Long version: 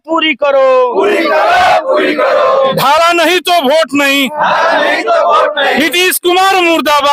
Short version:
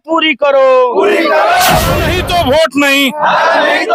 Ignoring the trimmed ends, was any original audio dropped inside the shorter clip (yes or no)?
yes